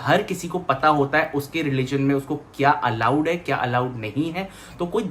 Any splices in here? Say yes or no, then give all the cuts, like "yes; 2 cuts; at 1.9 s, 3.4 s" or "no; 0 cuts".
no; 0 cuts